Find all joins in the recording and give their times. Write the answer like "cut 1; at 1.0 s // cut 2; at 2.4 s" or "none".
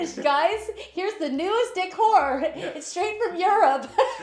none